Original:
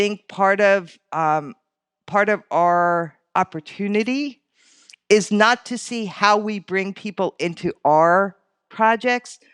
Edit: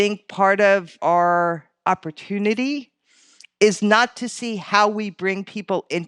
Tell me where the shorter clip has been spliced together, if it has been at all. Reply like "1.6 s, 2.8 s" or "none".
1.0 s